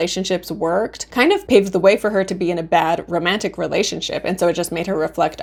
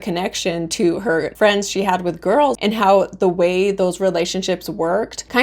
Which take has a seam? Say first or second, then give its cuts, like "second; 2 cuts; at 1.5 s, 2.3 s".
second; 2 cuts; at 1.3 s, 2.6 s